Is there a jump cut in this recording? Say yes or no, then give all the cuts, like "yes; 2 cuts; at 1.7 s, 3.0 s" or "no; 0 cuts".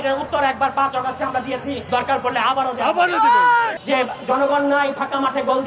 yes; 1 cut; at 3.8 s